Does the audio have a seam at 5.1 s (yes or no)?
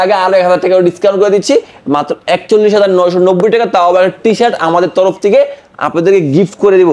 no